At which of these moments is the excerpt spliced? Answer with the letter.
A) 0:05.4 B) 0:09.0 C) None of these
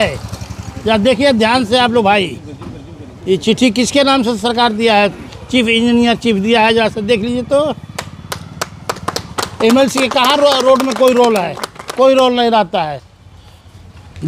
C